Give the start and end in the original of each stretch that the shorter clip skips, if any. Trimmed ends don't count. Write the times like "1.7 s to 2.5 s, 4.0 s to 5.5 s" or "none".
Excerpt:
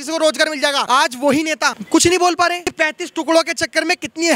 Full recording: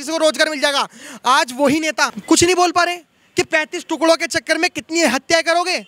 0.8 s to 1.2 s, 3.1 s to 3.4 s